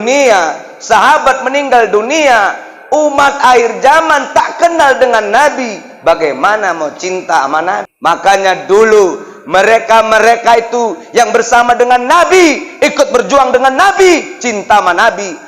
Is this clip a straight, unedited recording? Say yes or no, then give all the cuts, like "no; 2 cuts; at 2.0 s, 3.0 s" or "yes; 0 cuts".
no; 1 cut; at 7.9 s